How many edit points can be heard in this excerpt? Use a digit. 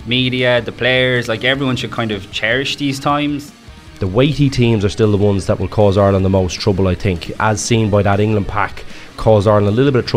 3